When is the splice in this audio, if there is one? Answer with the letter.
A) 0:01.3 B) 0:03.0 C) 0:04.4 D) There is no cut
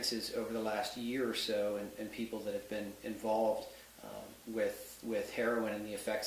C